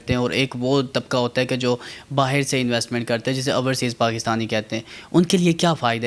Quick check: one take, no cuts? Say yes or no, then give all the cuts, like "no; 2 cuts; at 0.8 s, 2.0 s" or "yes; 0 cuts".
yes; 0 cuts